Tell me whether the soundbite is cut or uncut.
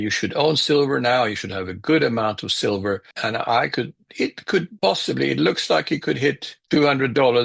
cut